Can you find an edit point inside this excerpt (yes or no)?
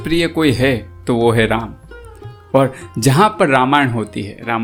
no